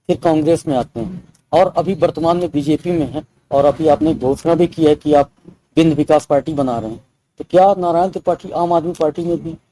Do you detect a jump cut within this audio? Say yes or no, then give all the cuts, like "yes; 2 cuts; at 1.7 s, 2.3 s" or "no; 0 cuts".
no; 0 cuts